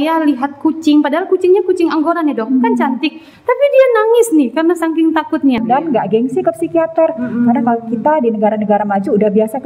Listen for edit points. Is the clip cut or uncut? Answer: cut